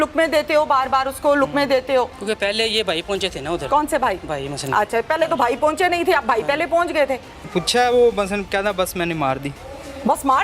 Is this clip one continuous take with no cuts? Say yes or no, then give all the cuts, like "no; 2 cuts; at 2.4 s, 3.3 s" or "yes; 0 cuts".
no; 2 cuts; at 2.2 s, 7.4 s